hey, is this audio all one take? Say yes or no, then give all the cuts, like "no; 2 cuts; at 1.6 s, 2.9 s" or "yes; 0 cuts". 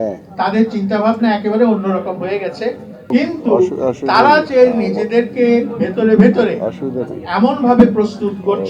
no; 1 cut; at 3.1 s